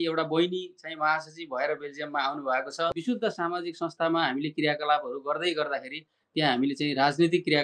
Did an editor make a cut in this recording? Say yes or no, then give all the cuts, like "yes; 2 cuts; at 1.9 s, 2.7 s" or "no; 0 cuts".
yes; 1 cut; at 2.9 s